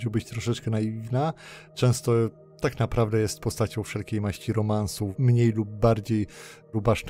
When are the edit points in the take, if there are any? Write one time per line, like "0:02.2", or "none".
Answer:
none